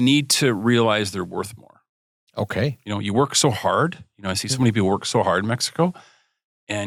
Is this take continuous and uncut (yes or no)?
yes